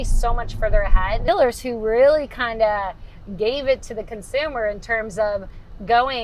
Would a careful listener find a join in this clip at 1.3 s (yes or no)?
yes